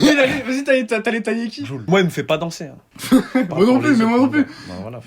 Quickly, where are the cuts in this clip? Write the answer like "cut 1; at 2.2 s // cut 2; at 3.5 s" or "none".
cut 1; at 1.9 s